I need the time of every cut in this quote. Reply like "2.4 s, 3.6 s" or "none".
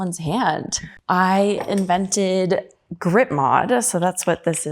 0.9 s